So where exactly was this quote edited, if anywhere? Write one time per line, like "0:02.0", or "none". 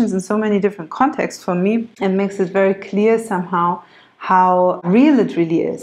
0:01.9
0:04.8